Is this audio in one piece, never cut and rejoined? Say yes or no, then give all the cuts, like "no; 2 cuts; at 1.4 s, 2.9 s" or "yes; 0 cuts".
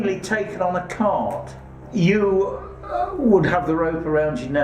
no; 1 cut; at 1.8 s